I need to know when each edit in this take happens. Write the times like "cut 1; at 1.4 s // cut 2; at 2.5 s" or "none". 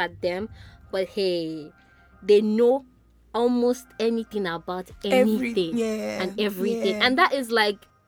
none